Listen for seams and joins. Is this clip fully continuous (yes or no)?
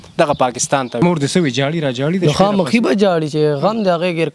no